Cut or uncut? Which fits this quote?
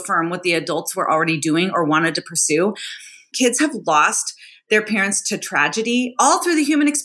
cut